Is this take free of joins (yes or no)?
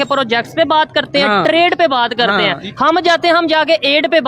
yes